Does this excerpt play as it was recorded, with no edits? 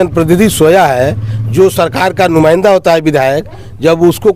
yes; 0 cuts

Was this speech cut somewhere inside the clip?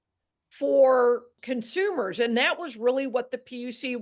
yes; 1 cut; at 1.3 s

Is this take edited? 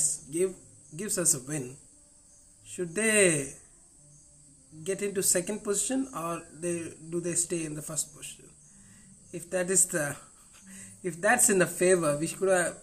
no; 0 cuts

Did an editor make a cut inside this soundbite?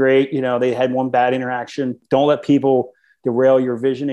yes; 1 cut; at 2.0 s

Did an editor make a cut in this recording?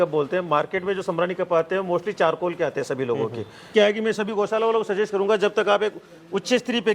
yes; 1 cut; at 3.7 s

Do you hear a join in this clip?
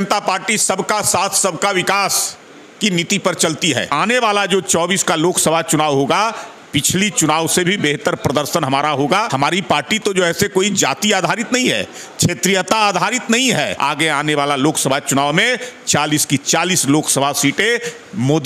yes; 3 cuts; at 3.9 s, 9.3 s, 13.7 s

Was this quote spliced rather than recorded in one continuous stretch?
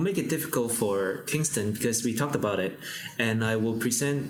no; 0 cuts

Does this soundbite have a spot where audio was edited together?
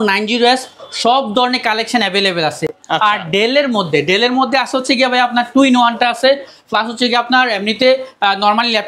no; 0 cuts

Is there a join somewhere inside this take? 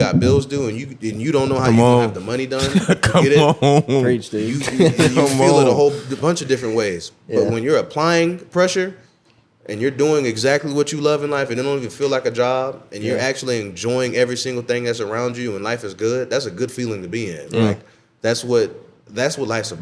no; 0 cuts

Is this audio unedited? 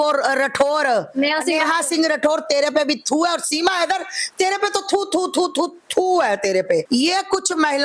no; 1 cut; at 6.9 s

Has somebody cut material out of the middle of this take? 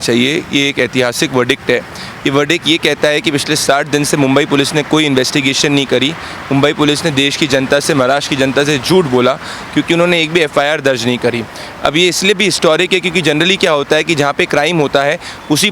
no; 0 cuts

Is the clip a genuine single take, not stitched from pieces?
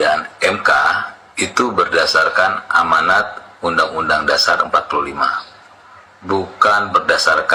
yes; 0 cuts

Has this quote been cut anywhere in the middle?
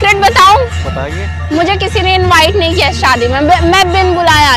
no; 0 cuts

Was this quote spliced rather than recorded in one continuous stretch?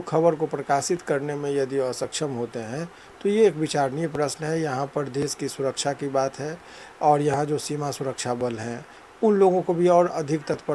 no; 0 cuts

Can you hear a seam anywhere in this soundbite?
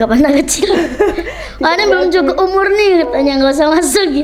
no; 0 cuts

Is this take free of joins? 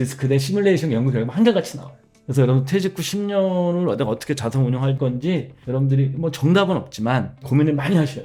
yes; 0 cuts

